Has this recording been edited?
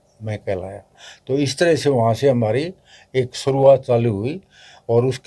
no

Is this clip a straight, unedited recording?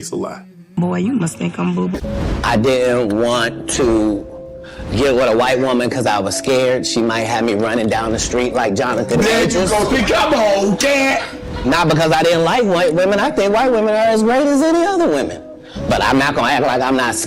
no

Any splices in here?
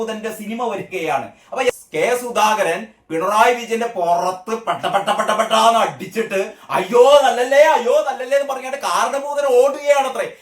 yes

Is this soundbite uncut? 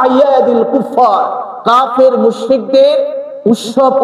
yes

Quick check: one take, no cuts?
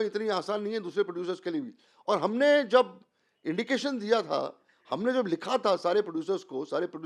yes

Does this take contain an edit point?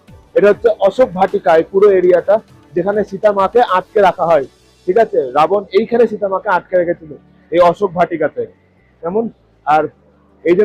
no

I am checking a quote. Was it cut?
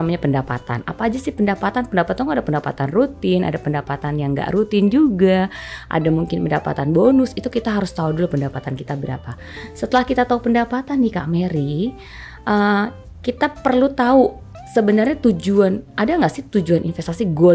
no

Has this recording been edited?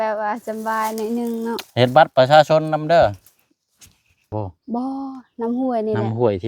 yes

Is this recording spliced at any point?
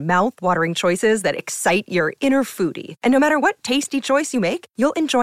no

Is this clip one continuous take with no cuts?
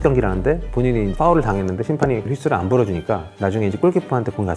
yes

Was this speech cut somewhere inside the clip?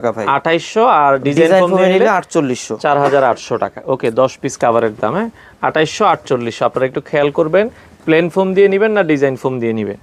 no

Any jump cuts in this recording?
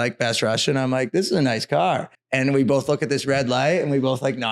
yes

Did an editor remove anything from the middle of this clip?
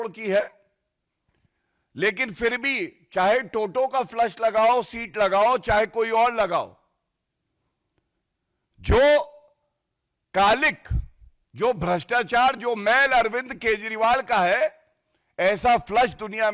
no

